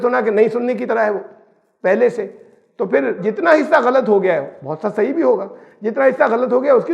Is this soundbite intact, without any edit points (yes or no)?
no